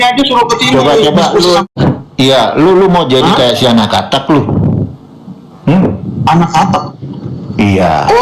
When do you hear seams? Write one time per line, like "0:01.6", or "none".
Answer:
0:01.6